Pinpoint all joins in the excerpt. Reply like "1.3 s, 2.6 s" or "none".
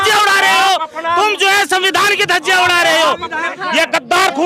3.5 s